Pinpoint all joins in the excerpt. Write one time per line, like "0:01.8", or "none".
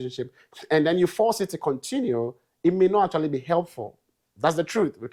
none